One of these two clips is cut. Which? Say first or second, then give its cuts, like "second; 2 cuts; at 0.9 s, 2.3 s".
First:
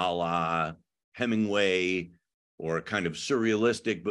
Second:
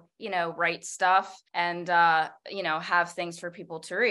second; 2 cuts; at 1.4 s, 2.4 s